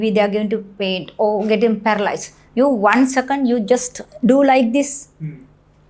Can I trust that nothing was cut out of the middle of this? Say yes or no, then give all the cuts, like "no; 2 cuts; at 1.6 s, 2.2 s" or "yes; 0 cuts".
yes; 0 cuts